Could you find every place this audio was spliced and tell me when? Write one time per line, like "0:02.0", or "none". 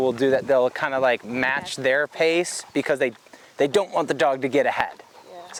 none

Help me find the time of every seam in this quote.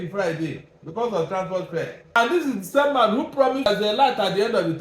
0:02.2
0:03.7

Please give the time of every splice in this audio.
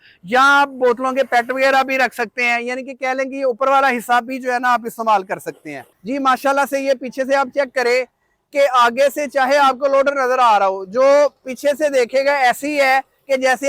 0:05.9

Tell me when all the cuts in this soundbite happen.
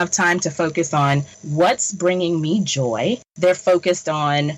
0:01.4
0:03.3

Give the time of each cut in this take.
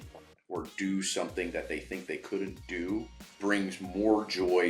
0:03.2

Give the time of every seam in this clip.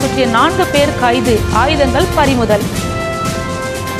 0:02.6

